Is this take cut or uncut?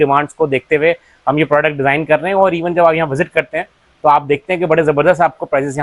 uncut